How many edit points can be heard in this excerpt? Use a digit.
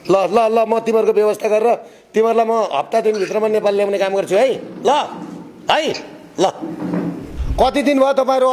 1